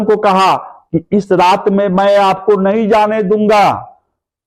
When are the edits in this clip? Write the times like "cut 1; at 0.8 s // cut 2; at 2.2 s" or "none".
none